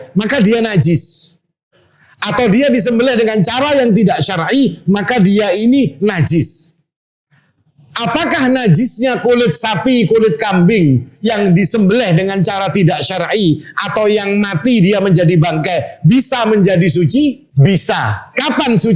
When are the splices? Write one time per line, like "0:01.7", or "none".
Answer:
0:17.4